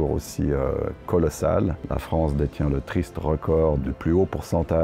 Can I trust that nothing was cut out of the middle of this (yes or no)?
no